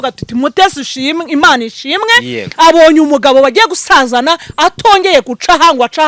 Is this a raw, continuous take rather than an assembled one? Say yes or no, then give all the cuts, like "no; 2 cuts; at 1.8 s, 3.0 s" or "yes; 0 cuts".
yes; 0 cuts